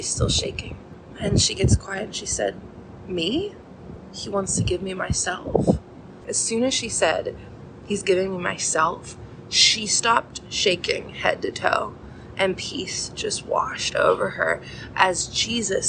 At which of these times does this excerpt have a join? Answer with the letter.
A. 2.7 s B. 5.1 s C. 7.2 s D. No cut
D